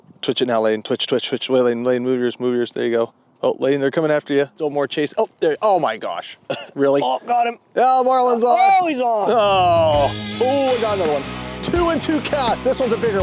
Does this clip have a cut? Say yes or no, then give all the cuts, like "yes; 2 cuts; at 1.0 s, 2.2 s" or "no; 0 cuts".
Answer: yes; 2 cuts; at 4.6 s, 10.2 s